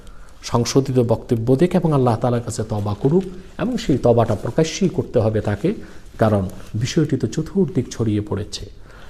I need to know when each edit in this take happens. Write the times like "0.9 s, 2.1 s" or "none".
none